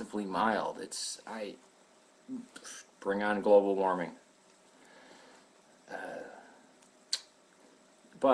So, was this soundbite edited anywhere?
no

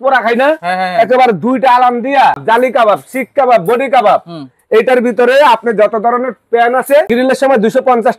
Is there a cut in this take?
yes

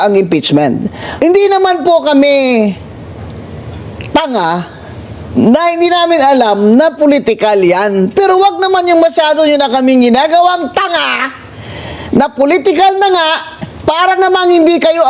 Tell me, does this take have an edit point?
no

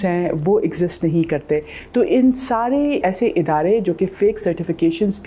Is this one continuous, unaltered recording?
no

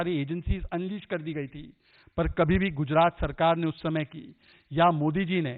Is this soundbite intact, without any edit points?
yes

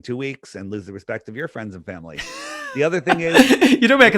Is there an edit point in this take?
yes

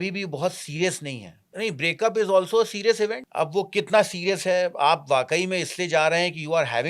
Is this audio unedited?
no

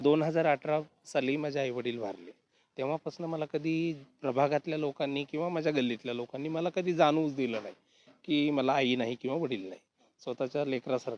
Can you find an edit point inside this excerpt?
no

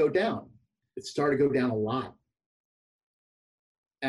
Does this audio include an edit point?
no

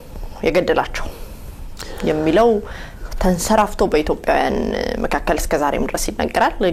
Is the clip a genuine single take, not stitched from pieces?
yes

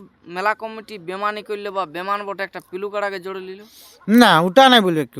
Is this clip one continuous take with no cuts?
yes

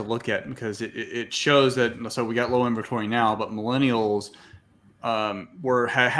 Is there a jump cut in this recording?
no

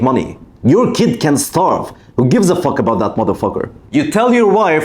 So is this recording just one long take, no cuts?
no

